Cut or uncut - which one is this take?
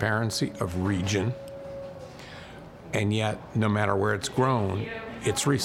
uncut